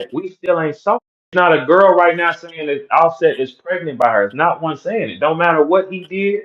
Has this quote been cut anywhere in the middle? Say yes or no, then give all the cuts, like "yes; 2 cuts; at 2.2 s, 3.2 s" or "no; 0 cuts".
yes; 1 cut; at 1.0 s